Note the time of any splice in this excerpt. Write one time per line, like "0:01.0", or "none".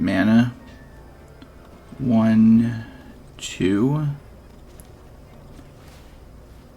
0:04.5